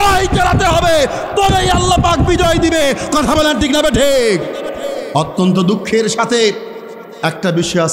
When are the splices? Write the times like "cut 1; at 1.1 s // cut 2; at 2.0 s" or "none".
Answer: cut 1; at 5.0 s

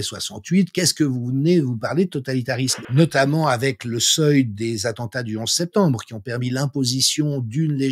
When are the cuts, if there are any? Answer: cut 1; at 2.8 s

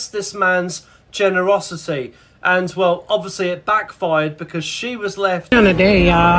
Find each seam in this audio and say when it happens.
cut 1; at 5.4 s

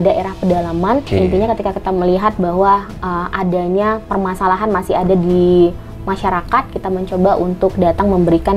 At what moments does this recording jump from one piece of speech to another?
cut 1; at 1.1 s

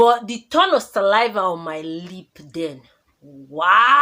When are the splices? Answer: none

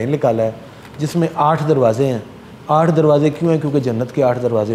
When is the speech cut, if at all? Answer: none

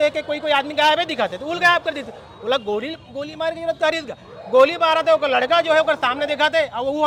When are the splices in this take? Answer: none

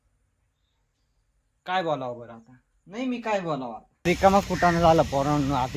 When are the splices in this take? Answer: cut 1; at 4.1 s

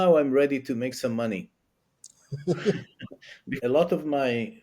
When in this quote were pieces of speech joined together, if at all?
cut 1; at 3.5 s

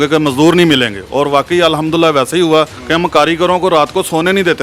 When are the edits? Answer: cut 1; at 2.8 s

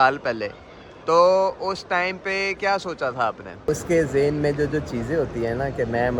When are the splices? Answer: cut 1; at 3.7 s

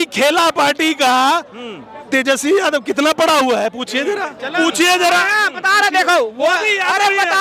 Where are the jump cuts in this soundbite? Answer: none

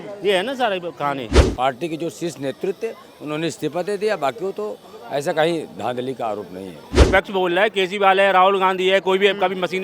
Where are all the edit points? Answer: cut 1; at 1.4 s // cut 2; at 6.9 s

